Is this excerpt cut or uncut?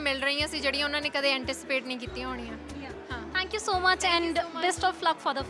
uncut